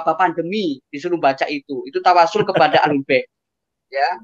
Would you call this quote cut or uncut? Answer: uncut